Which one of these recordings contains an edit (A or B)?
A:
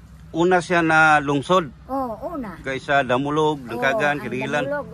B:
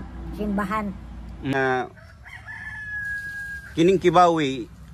B